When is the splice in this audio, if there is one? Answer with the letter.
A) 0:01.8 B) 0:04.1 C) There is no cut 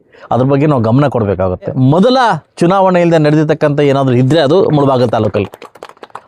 A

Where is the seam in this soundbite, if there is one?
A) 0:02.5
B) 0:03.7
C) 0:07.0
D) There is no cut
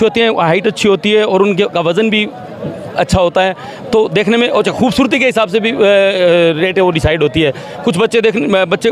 D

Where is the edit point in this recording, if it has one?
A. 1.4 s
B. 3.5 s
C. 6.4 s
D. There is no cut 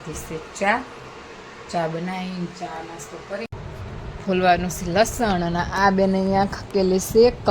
B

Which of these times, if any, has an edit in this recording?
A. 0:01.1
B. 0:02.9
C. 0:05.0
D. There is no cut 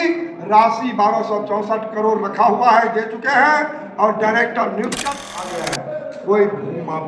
C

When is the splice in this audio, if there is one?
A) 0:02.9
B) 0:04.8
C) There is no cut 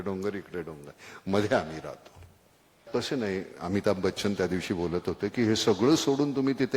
A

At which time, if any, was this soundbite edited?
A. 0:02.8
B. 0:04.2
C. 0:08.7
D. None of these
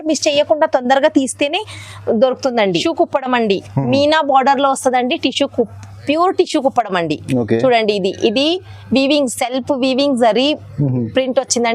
A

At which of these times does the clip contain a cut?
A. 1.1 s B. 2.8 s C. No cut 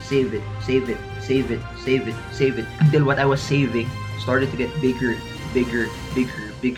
C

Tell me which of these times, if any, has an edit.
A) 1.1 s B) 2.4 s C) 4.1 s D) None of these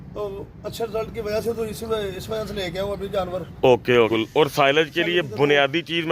C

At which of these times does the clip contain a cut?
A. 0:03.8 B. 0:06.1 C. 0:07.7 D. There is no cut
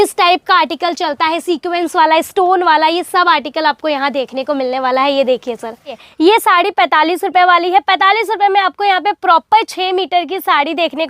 B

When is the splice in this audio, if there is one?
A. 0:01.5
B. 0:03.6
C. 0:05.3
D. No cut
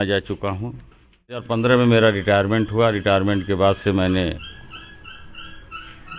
A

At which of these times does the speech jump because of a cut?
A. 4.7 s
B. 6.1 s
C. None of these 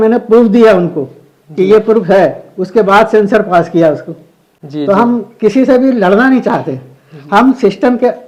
C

